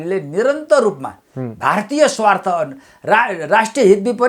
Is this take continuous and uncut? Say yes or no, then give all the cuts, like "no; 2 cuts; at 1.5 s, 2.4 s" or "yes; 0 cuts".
yes; 0 cuts